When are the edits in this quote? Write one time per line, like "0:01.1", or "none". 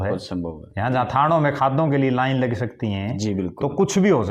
none